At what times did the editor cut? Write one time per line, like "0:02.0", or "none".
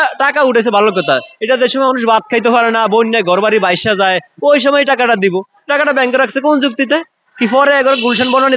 none